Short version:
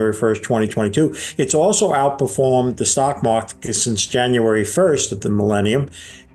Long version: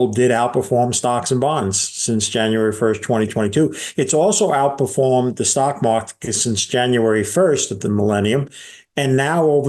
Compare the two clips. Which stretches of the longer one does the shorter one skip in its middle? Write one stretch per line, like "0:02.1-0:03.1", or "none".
none